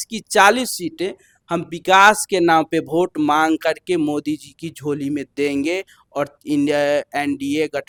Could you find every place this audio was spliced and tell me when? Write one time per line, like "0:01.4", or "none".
none

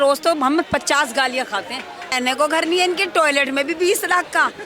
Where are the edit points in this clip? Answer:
0:02.1

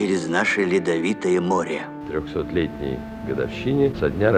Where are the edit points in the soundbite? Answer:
0:02.0

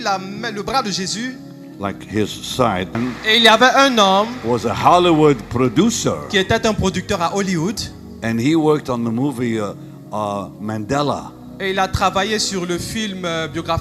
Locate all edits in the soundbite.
0:03.0

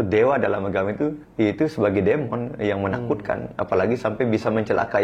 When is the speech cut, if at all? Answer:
0:01.2

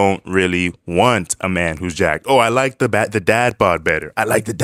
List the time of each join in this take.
none

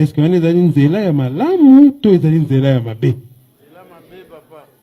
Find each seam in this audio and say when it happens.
none

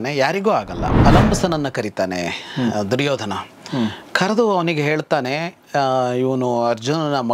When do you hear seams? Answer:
0:00.9

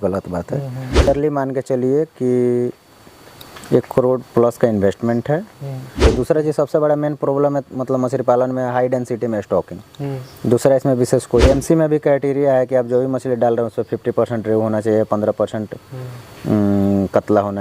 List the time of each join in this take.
0:01.1
0:06.1
0:11.4

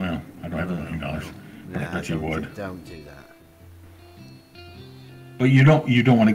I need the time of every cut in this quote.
0:03.2
0:05.0

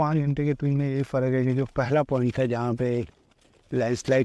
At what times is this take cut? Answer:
none

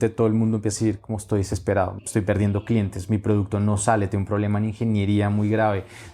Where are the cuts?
0:02.0

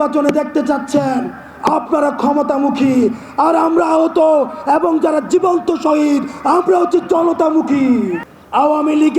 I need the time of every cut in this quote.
0:08.2

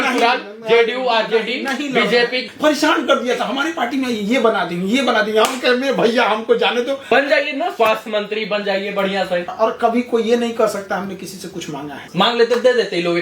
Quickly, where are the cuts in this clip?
0:02.4
0:07.1
0:09.5
0:12.0

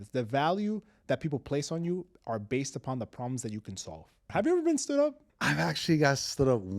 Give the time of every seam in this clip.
0:04.2
0:05.2

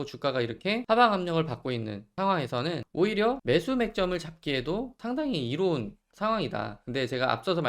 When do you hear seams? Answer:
0:00.8
0:02.0
0:02.8
0:03.4
0:05.0

